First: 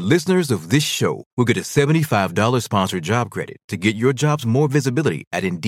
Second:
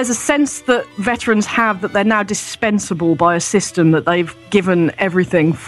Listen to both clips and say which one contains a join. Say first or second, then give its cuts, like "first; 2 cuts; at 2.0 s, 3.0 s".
second; 2 cuts; at 0.9 s, 4.4 s